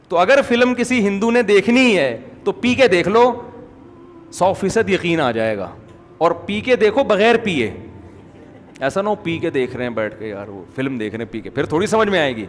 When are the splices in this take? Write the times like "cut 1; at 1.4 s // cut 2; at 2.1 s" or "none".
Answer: none